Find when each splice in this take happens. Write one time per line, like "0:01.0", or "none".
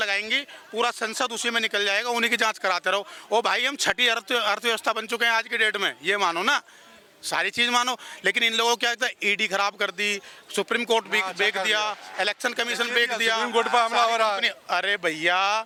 none